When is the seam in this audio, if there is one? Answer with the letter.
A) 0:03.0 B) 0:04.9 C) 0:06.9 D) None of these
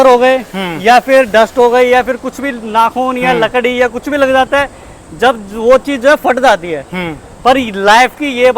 D